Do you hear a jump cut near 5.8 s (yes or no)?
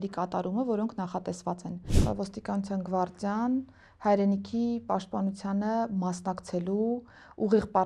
no